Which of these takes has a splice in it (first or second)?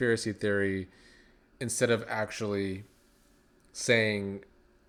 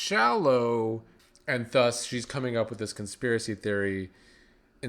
second